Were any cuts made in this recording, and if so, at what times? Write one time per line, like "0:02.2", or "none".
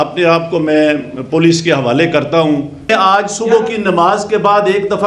0:02.9